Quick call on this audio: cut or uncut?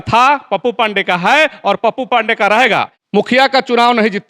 cut